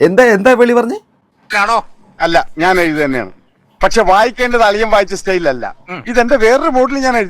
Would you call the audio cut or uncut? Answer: cut